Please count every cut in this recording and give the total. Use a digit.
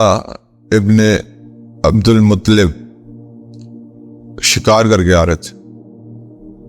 2